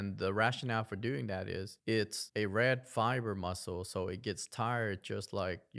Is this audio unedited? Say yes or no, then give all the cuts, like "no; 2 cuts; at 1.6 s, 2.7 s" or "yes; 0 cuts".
no; 1 cut; at 2.2 s